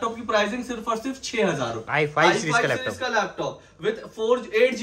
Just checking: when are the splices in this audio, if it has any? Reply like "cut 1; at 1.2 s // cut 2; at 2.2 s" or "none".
cut 1; at 1.8 s